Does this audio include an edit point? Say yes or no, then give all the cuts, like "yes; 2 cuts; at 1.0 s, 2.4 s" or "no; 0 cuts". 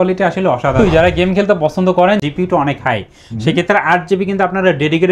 yes; 2 cuts; at 0.9 s, 2.2 s